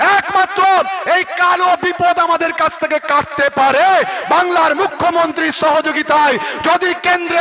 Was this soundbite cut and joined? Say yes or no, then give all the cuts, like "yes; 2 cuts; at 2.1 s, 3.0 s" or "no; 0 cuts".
no; 0 cuts